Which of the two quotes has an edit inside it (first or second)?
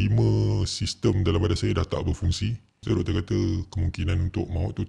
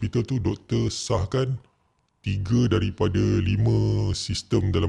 first